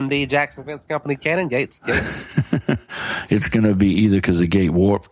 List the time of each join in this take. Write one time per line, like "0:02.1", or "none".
none